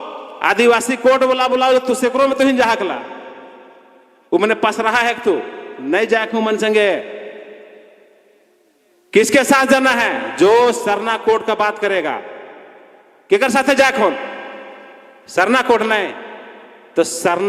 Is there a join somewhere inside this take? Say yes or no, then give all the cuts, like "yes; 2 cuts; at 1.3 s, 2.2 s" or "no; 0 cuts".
no; 0 cuts